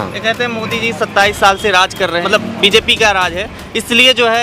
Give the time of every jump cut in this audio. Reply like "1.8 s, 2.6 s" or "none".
2.2 s